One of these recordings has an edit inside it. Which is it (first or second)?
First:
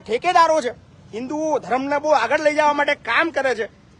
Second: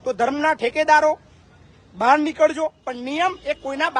second